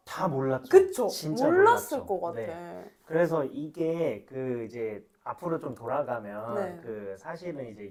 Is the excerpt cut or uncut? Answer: uncut